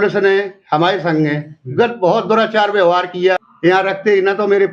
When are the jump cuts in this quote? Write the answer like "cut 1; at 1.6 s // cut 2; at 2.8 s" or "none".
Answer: cut 1; at 3.5 s